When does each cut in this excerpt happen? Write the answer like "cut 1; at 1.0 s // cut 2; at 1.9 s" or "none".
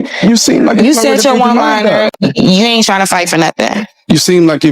cut 1; at 2.1 s